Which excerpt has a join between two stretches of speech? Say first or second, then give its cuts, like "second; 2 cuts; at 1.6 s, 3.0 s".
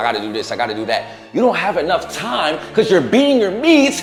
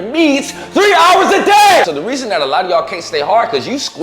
second; 1 cut; at 1.8 s